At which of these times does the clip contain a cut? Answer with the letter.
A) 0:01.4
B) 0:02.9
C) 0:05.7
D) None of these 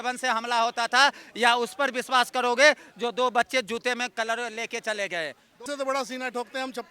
C